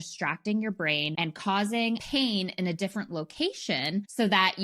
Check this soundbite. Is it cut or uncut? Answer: cut